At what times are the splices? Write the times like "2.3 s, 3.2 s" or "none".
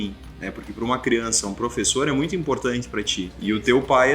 3.2 s